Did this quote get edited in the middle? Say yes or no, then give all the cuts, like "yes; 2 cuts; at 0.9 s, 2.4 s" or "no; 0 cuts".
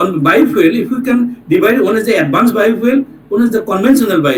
no; 0 cuts